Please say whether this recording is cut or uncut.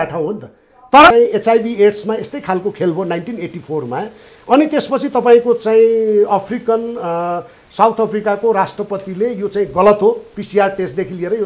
cut